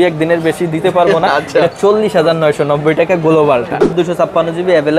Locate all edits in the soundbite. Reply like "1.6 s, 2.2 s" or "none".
3.8 s